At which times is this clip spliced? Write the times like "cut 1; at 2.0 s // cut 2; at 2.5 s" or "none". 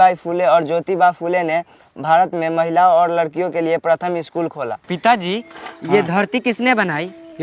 cut 1; at 4.8 s